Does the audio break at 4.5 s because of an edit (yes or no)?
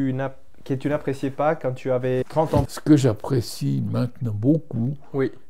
no